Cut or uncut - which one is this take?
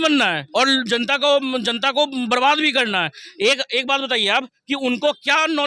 uncut